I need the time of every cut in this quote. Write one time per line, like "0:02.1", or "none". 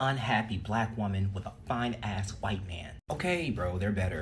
none

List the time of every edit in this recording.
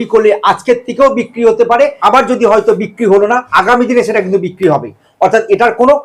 0:02.0
0:03.4

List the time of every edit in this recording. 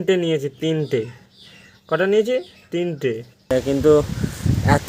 0:03.5

